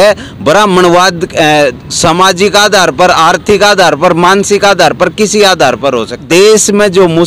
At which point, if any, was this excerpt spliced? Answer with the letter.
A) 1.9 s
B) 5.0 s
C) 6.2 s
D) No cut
C